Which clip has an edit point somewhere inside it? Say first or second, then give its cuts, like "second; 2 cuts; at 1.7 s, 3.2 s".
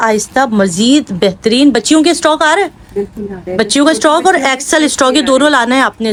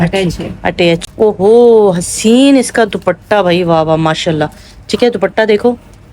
second; 1 cut; at 1.0 s